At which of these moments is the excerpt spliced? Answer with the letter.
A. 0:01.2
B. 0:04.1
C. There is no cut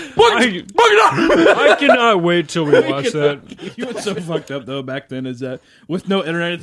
B